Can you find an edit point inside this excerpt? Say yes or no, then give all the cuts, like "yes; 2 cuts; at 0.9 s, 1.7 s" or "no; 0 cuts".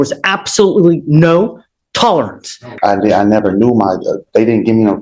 yes; 1 cut; at 2.7 s